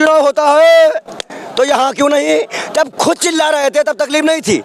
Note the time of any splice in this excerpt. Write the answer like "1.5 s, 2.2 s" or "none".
none